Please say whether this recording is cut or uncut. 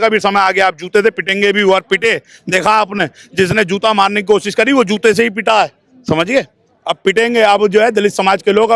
uncut